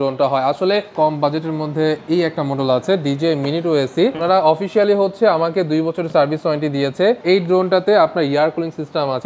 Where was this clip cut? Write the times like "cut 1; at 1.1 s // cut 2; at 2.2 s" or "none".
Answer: cut 1; at 0.9 s // cut 2; at 4.2 s // cut 3; at 7.2 s